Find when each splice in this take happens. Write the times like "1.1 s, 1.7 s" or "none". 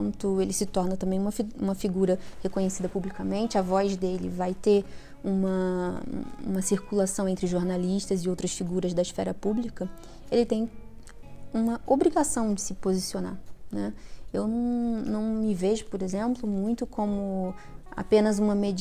none